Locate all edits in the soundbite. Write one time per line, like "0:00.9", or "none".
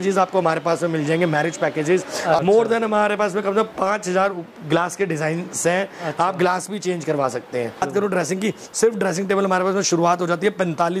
0:02.4
0:07.8